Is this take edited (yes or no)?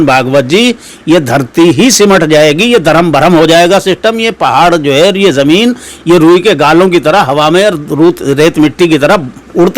no